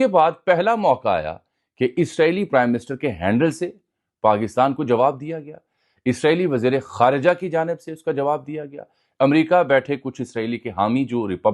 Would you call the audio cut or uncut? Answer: uncut